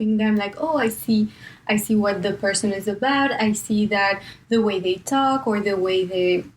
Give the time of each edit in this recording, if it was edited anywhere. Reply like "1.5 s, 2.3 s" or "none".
none